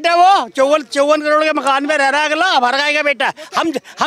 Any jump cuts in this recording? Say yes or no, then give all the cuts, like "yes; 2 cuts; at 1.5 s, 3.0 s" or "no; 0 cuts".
no; 0 cuts